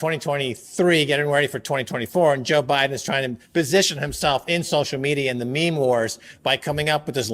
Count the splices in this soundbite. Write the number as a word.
zero